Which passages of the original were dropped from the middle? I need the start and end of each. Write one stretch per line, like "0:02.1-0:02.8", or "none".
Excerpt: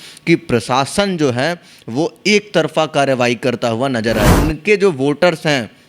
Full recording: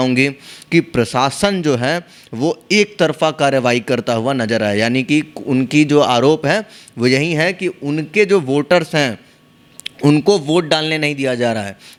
0:04.7-0:07.8